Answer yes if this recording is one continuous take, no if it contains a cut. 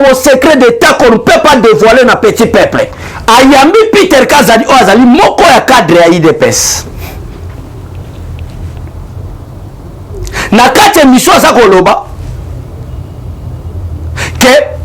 no